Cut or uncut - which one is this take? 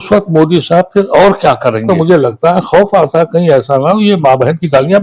cut